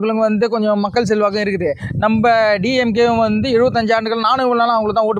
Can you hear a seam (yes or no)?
no